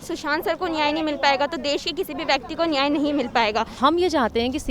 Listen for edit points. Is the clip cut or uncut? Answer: cut